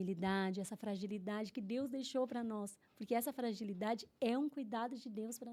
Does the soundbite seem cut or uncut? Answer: uncut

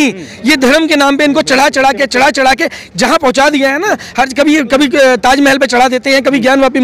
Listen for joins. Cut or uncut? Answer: uncut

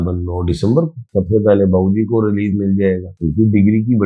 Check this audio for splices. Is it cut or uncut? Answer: cut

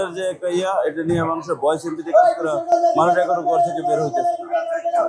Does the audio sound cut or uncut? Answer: uncut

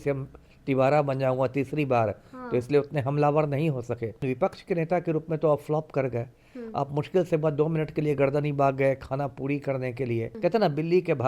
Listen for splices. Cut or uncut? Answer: cut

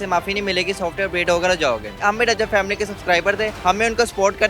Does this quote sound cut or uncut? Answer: cut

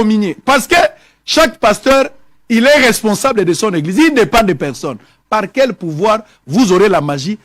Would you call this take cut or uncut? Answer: uncut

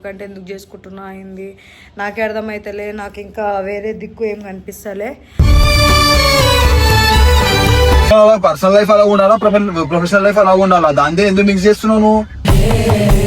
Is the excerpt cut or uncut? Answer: cut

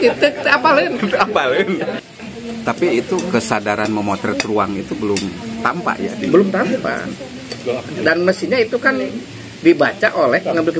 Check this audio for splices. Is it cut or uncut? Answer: cut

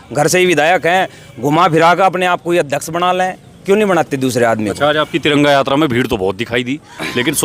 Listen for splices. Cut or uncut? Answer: uncut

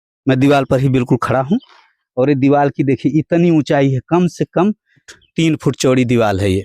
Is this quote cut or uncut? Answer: cut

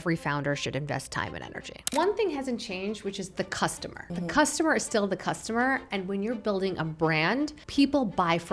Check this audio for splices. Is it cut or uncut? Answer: cut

